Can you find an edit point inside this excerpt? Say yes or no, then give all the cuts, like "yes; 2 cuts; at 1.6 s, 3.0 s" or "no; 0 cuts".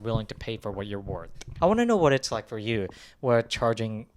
yes; 1 cut; at 1.4 s